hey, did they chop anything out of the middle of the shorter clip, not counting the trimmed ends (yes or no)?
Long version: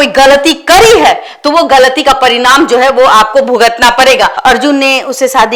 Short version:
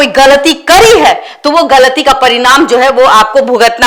no